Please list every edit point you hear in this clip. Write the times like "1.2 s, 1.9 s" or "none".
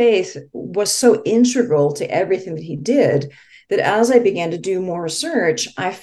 none